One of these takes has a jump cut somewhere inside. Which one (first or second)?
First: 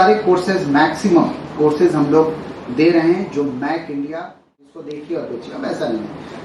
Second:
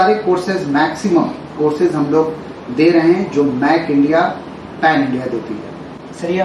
first